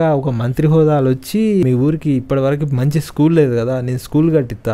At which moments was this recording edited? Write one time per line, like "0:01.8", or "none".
0:01.6